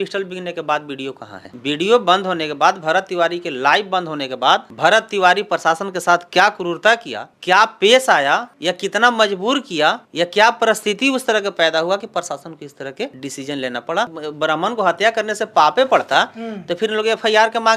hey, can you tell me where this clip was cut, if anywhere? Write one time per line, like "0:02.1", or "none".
0:01.5
0:14.1